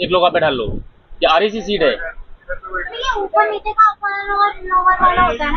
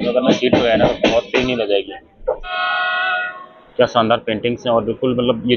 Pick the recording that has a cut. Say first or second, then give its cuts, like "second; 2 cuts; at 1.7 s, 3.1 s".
second; 1 cut; at 2.5 s